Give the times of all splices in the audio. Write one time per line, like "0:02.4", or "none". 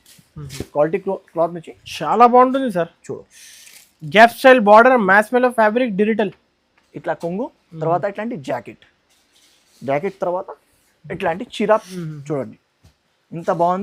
0:12.1